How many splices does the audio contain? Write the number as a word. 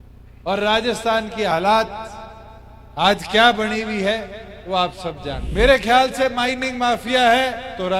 one